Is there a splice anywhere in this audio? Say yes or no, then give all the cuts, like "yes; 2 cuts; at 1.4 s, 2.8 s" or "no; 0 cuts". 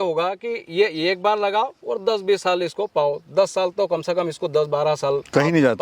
no; 0 cuts